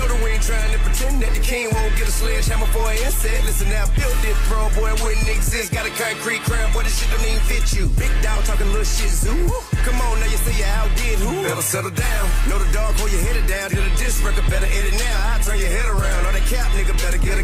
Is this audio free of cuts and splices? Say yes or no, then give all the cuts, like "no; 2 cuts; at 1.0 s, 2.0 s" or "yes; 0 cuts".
yes; 0 cuts